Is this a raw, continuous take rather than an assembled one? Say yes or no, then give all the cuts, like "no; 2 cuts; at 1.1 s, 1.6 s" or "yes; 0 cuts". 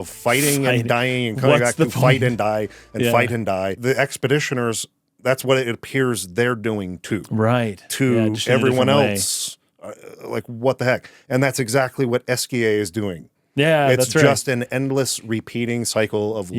no; 1 cut; at 3.7 s